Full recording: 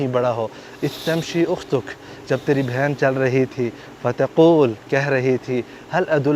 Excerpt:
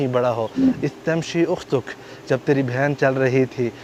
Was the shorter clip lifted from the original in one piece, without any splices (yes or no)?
yes